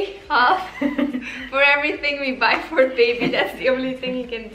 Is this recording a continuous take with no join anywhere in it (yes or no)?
yes